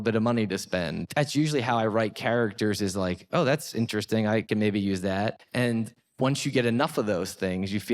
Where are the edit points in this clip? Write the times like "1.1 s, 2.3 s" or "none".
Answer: 1.0 s, 4.5 s, 5.7 s